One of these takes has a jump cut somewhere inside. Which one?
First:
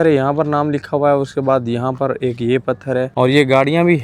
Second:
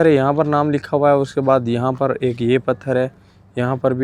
first; 1 cut; at 3.1 s

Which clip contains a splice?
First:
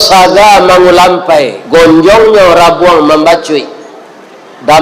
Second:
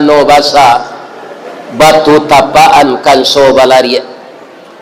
first; 1 cut; at 1.6 s

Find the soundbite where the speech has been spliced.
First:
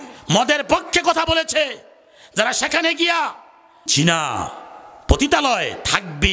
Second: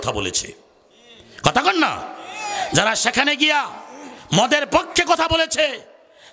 first; 1 cut; at 3.9 s

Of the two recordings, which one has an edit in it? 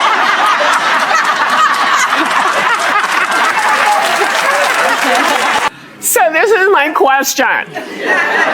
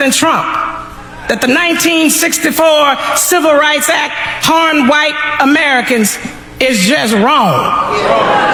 first; 1 cut; at 5.7 s

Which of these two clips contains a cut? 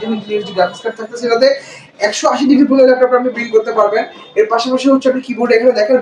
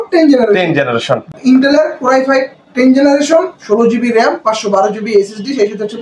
second; 1 cut; at 1.3 s

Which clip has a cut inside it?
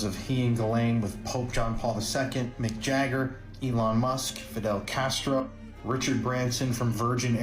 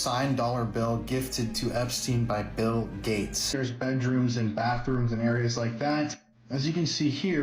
second; 1 cut; at 3.5 s

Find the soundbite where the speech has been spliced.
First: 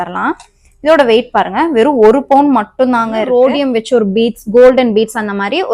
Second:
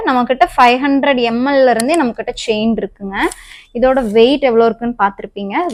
first; 1 cut; at 3.3 s

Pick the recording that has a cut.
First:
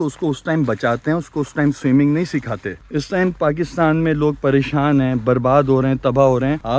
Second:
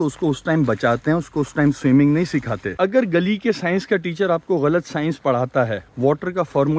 second; 1 cut; at 2.7 s

